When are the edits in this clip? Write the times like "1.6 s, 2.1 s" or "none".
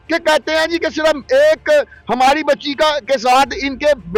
none